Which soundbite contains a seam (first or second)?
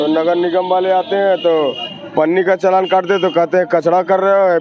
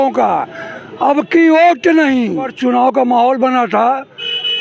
second